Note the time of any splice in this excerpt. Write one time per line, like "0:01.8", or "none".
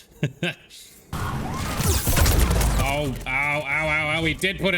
0:01.1